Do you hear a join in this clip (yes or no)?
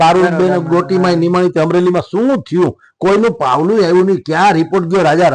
no